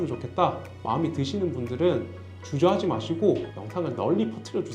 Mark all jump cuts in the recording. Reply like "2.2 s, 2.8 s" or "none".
3.6 s